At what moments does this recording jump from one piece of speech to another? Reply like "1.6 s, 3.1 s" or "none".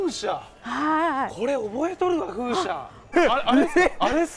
3.1 s